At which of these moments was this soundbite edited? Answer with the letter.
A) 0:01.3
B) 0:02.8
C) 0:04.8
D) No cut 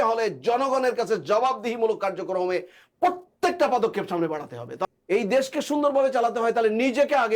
C